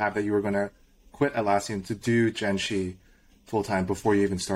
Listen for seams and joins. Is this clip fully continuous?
yes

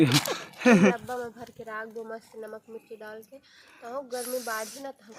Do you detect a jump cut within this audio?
yes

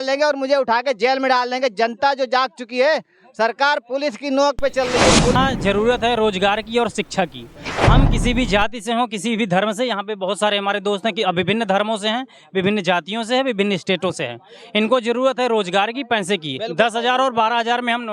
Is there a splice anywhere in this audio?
yes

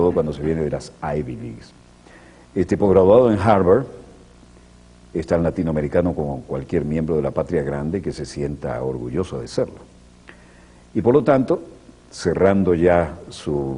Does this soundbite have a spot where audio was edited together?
yes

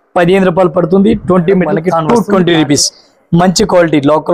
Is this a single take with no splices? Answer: no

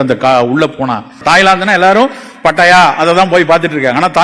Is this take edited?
yes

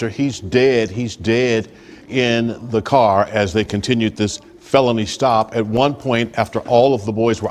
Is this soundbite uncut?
yes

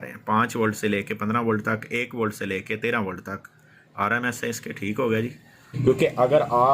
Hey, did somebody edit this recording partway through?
yes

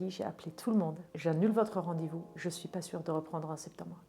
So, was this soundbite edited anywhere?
yes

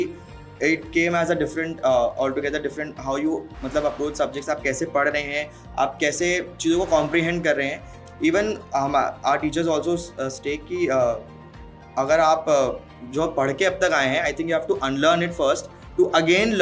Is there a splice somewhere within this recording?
no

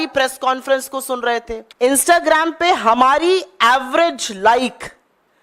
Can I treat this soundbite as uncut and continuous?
no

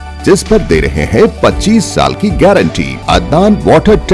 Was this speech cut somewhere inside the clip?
yes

